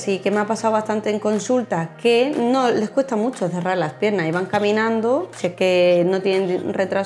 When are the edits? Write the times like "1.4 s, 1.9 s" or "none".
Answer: none